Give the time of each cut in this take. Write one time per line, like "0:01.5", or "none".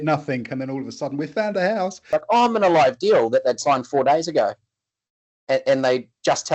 0:02.1